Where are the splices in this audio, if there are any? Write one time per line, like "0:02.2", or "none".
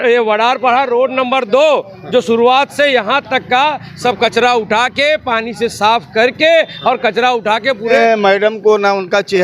0:08.0